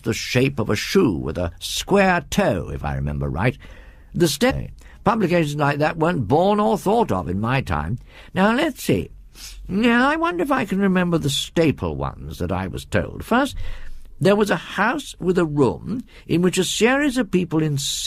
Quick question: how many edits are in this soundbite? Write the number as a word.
zero